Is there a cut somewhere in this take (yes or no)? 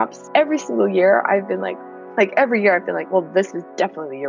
yes